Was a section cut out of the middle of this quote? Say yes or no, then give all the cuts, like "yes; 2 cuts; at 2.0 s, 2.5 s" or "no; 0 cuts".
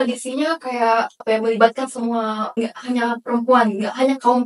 yes; 2 cuts; at 1.2 s, 2.4 s